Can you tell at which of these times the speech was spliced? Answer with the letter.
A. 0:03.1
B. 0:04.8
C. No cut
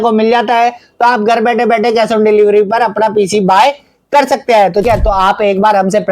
B